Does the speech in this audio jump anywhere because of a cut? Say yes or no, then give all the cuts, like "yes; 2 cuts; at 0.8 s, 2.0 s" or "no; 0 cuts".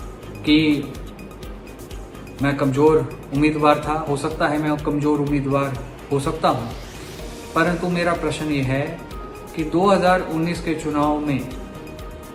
no; 0 cuts